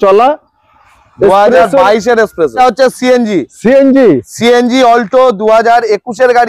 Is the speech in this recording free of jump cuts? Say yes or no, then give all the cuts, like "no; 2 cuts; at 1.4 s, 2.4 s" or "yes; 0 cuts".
no; 1 cut; at 2.5 s